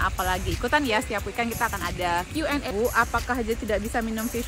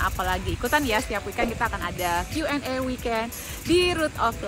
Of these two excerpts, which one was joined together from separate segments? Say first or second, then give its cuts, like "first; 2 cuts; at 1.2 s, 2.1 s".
first; 1 cut; at 2.7 s